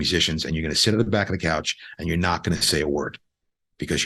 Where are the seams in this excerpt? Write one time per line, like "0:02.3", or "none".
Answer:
none